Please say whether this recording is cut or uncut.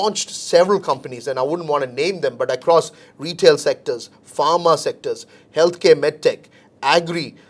uncut